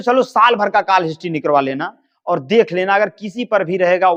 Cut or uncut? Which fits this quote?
uncut